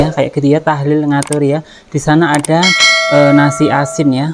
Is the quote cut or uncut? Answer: uncut